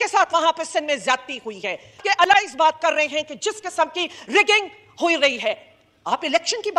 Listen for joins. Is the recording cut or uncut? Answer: cut